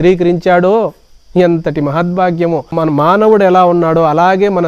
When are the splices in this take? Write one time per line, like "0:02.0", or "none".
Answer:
0:02.7